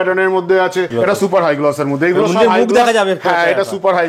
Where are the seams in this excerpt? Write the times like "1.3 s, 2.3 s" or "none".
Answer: 0.9 s